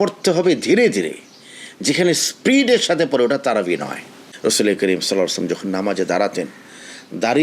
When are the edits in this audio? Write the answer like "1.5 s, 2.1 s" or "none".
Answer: 4.2 s